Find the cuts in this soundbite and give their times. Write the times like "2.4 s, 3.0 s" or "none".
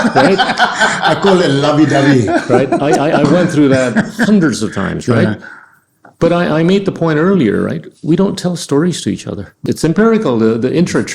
9.5 s